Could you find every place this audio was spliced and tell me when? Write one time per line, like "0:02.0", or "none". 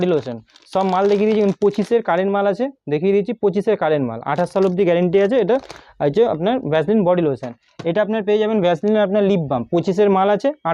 none